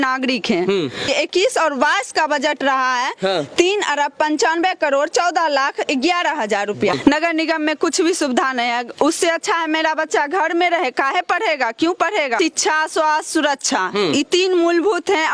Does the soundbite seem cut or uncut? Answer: cut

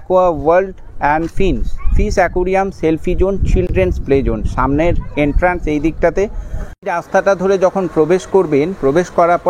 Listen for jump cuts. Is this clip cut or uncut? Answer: uncut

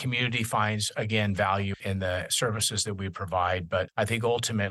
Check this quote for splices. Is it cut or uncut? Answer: cut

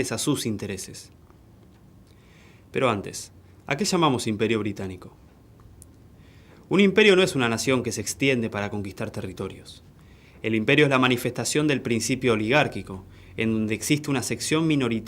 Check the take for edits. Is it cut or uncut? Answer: cut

